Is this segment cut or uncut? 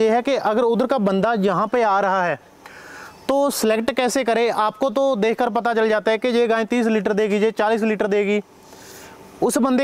uncut